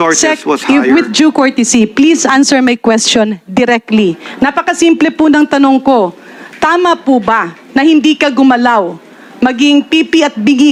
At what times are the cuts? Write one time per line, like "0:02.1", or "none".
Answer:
none